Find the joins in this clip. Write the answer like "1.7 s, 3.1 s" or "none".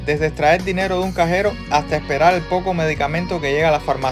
none